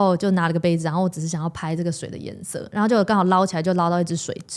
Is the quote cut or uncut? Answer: uncut